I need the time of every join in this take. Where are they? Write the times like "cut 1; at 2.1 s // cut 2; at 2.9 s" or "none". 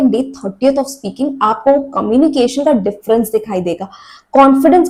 none